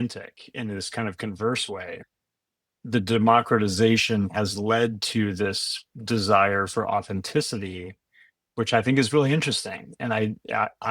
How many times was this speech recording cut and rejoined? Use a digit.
1